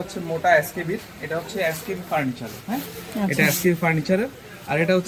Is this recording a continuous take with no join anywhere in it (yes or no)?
yes